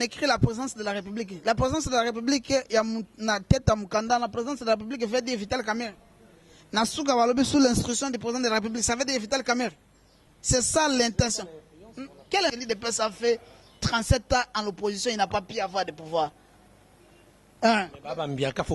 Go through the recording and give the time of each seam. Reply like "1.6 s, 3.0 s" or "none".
12.5 s